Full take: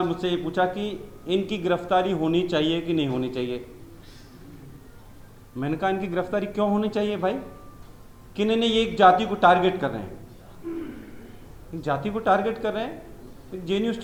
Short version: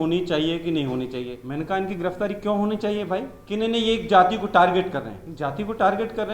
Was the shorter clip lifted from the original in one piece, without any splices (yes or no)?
no